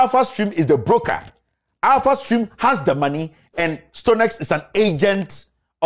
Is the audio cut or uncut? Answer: uncut